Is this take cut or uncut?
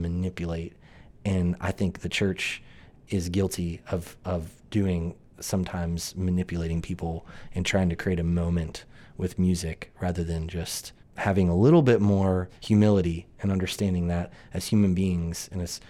cut